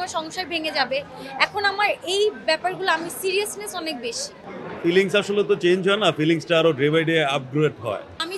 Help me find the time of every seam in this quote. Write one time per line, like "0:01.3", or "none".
none